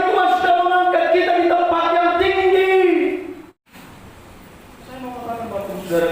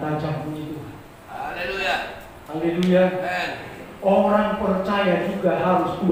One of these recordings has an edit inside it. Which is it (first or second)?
first